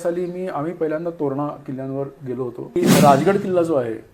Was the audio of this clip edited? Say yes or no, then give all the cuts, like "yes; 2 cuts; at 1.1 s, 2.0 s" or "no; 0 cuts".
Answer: yes; 1 cut; at 2.8 s